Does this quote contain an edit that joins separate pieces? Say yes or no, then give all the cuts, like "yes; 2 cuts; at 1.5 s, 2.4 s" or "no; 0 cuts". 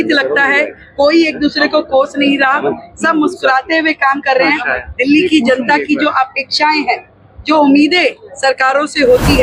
no; 0 cuts